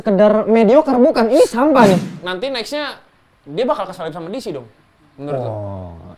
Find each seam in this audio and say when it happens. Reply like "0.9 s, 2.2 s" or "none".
2.1 s